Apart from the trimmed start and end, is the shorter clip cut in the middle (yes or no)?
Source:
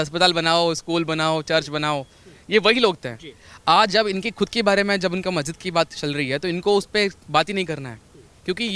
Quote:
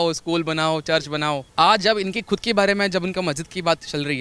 yes